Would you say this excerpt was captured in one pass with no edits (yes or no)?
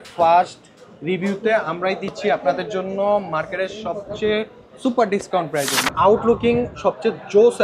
no